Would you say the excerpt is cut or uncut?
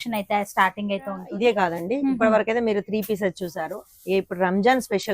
cut